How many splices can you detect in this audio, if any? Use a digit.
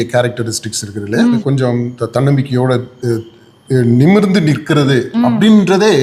1